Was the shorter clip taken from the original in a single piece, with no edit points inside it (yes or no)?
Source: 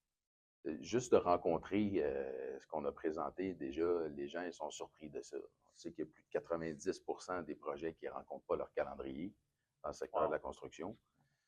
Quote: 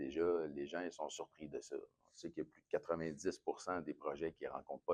yes